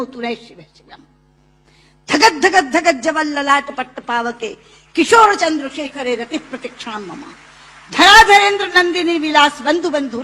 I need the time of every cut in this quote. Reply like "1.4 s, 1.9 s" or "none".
none